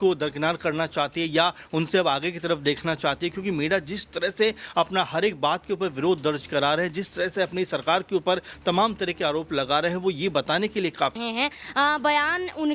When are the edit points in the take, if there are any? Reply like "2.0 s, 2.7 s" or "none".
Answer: 11.1 s